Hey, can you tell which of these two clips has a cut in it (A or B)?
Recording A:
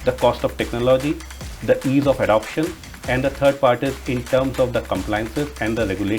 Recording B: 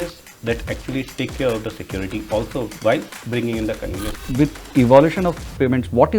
B